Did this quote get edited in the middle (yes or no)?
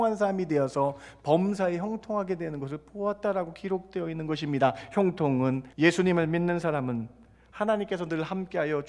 yes